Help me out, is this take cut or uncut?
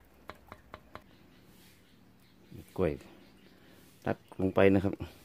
cut